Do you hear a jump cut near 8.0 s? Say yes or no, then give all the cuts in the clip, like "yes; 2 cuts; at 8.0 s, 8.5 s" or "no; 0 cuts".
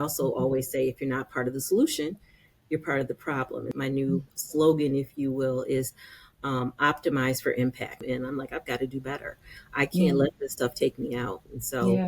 yes; 2 cuts; at 3.7 s, 8.0 s